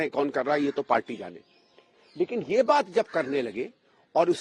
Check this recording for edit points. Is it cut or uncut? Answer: uncut